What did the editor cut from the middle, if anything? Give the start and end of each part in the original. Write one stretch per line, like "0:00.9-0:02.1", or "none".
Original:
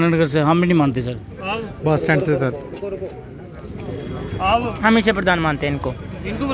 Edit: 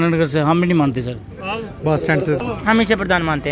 0:02.4-0:04.6